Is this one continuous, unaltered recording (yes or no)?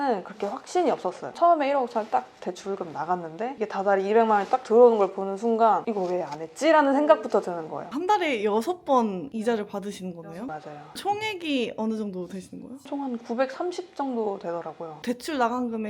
no